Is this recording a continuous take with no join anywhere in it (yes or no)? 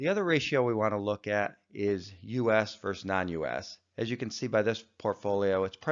no